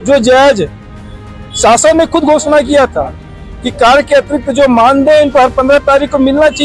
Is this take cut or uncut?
uncut